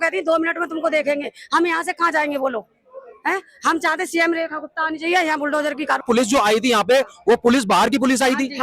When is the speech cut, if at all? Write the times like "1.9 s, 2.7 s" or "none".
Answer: 6.0 s